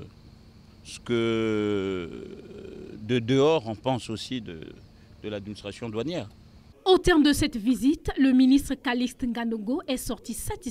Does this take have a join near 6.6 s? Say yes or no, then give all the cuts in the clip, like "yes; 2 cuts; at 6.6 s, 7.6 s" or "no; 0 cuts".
yes; 1 cut; at 6.6 s